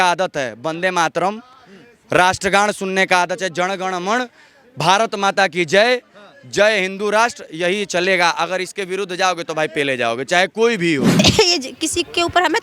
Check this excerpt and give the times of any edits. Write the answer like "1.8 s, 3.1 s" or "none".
11.2 s